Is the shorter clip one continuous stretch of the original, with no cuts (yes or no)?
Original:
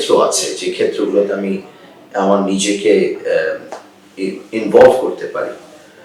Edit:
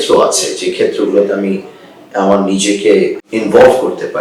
no